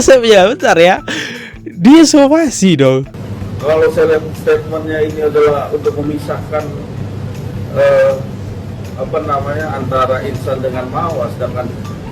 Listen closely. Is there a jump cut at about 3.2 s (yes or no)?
yes